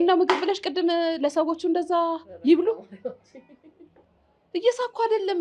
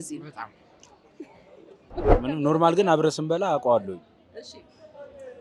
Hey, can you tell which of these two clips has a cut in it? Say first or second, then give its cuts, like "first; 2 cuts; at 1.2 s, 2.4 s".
second; 1 cut; at 2.1 s